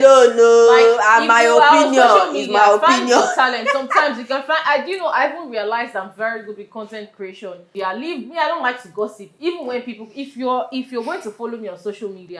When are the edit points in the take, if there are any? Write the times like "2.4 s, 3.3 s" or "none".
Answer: 7.7 s

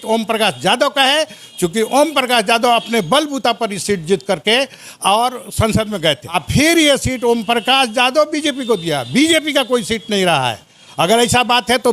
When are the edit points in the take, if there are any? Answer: 6.3 s

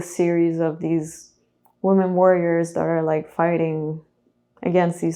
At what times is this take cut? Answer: none

